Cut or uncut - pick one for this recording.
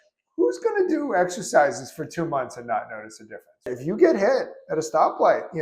cut